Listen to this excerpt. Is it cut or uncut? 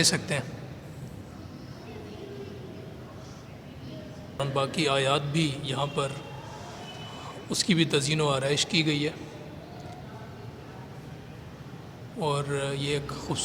cut